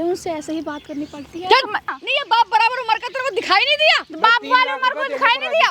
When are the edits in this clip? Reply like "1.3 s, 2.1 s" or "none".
1.9 s